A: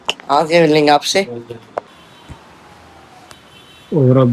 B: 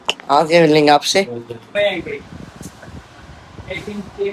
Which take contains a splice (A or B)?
B